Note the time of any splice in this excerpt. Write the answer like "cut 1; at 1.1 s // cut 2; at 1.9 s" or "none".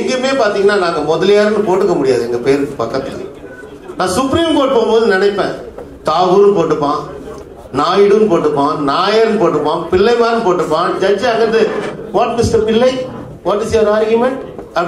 none